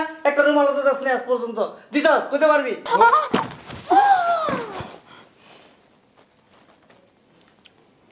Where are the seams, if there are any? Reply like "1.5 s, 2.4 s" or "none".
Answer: 2.9 s